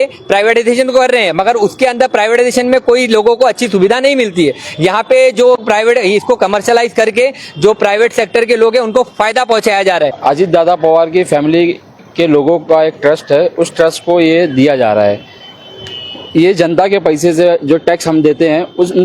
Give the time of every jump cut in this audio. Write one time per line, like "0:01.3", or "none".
0:10.2

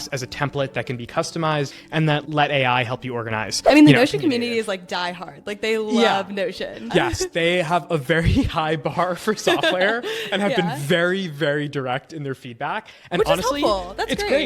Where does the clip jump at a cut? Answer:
0:02.1
0:03.5
0:06.9

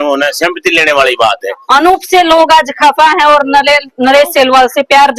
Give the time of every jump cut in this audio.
0:01.6
0:02.4

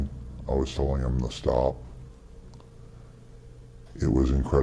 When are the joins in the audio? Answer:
none

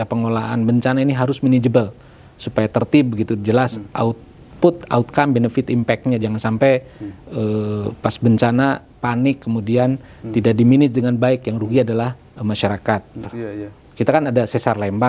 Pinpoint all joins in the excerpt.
0:13.4

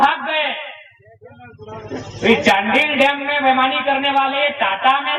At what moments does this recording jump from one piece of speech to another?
none

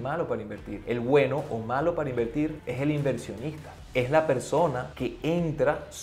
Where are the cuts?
none

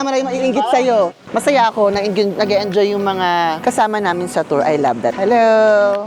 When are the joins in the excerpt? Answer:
0:01.2
0:05.1

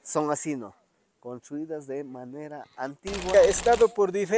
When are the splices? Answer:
0:03.3

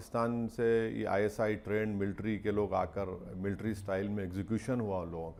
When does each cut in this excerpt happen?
none

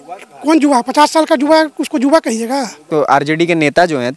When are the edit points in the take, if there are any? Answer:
0:02.9

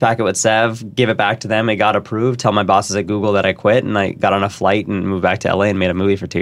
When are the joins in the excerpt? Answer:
none

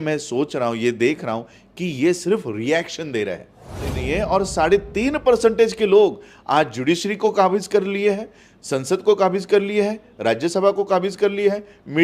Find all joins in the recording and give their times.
0:04.0

